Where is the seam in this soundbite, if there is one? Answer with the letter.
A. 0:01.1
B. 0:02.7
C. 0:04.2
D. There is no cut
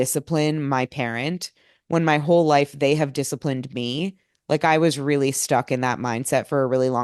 D